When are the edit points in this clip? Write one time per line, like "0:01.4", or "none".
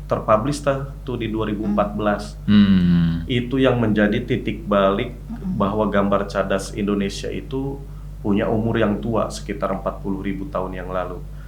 none